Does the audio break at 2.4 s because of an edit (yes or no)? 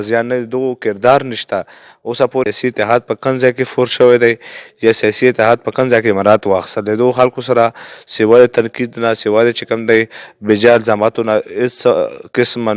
yes